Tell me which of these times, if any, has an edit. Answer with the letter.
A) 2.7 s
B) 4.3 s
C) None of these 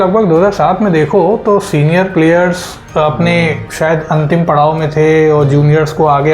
A